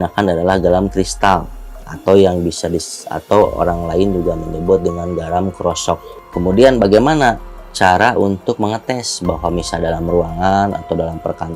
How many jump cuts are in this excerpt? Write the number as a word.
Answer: one